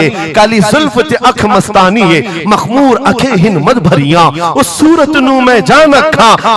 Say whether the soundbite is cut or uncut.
uncut